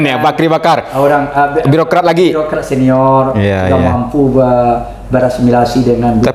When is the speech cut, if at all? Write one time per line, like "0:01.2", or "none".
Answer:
none